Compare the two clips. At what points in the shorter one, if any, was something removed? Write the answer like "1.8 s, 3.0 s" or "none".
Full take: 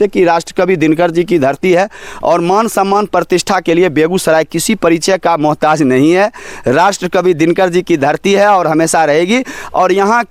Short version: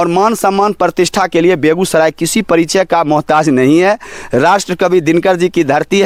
none